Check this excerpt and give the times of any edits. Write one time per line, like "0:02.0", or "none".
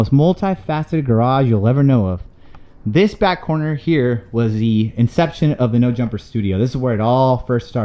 none